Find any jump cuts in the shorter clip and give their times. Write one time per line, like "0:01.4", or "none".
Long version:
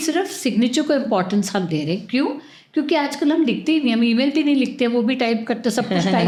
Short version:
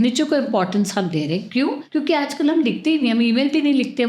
0:01.8